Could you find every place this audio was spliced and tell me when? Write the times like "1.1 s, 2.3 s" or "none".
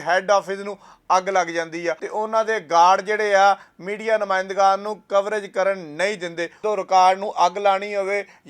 2.0 s, 6.6 s